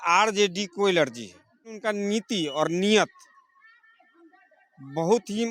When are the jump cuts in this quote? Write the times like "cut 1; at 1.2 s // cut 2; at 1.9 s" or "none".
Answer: cut 1; at 1.8 s